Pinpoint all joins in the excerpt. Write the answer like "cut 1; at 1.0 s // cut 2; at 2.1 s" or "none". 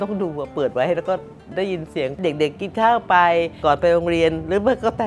cut 1; at 3.6 s